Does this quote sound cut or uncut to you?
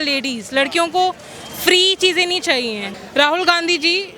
cut